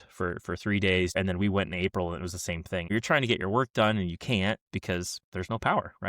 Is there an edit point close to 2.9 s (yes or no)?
yes